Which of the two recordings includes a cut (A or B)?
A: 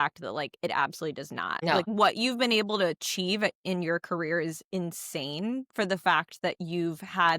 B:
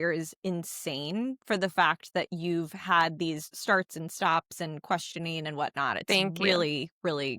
A